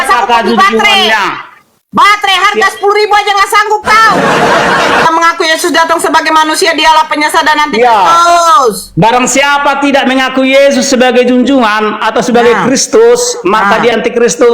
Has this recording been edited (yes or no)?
yes